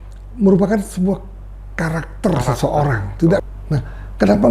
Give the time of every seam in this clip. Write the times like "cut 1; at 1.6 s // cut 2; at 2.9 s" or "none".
cut 1; at 3.4 s